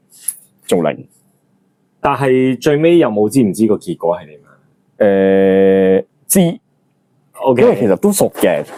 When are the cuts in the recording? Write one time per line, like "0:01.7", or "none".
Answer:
none

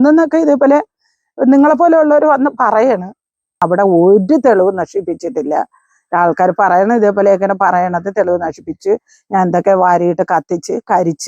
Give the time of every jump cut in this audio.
0:03.6

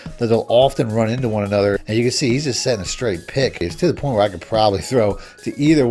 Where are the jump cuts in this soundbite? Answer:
0:01.8
0:03.6

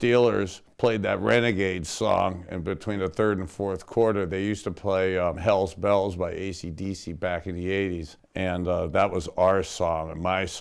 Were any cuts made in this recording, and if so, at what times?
0:05.4
0:08.2

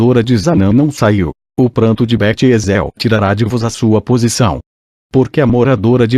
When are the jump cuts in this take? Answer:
0:05.0

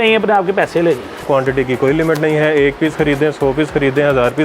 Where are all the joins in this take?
0:01.3

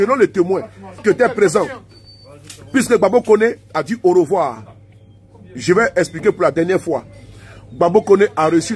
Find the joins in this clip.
0:01.0

